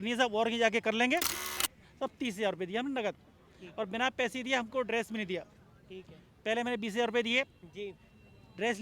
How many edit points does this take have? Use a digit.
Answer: 1